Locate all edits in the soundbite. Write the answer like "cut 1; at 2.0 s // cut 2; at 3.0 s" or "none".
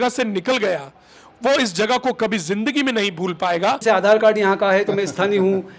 cut 1; at 3.8 s